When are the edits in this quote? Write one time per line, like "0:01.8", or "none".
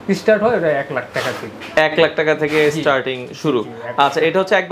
none

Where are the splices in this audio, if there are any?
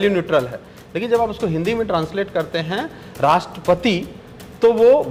none

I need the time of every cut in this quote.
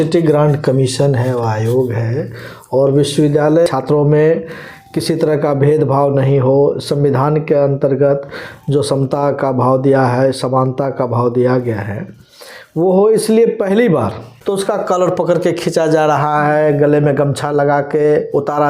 0:03.7
0:14.3

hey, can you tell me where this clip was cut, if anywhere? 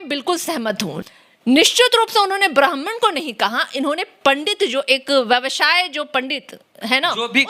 0:00.9

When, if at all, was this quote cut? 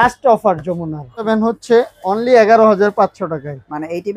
0:01.3

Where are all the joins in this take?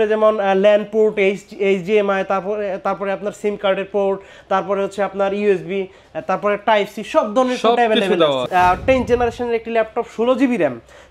0:08.4

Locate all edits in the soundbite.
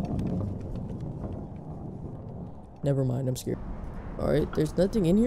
0:03.5

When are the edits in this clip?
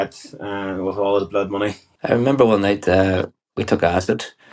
0:01.9

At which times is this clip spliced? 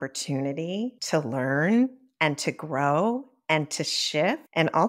none

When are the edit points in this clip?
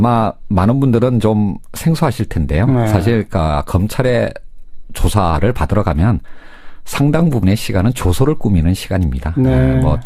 none

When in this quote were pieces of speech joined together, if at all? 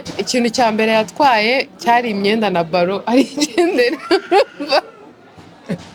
none

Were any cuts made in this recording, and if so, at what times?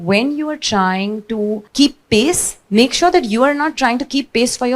0:01.6

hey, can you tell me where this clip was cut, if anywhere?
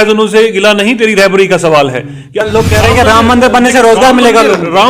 0:02.4

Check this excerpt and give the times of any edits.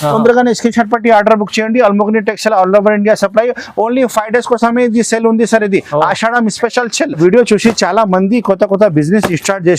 0:07.2

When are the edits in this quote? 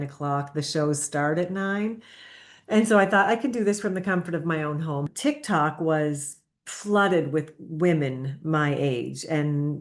0:05.1

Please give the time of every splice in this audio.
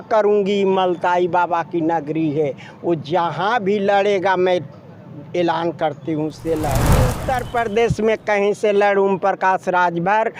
0:07.2

